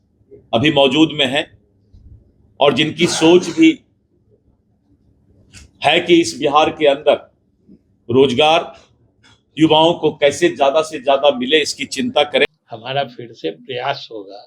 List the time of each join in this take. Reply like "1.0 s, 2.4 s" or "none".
12.4 s

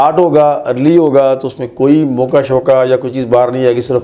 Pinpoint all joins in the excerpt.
none

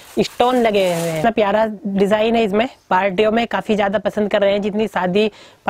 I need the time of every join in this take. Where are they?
1.2 s

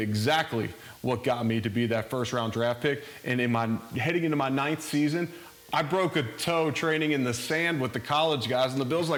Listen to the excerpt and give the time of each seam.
none

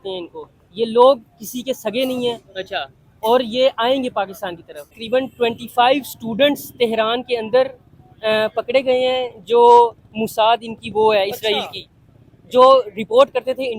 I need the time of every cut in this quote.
5.0 s

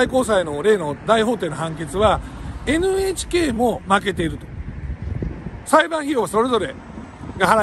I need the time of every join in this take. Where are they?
none

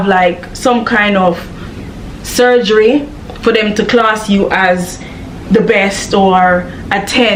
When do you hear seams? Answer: none

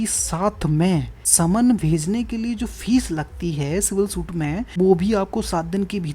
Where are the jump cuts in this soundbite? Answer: 1.2 s, 4.7 s

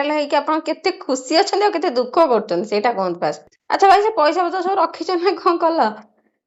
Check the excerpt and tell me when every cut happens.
3.6 s

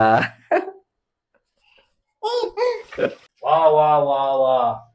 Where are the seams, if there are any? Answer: 3.3 s

